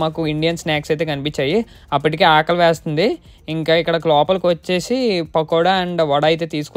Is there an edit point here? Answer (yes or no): no